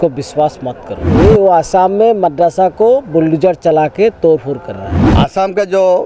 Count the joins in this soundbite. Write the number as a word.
two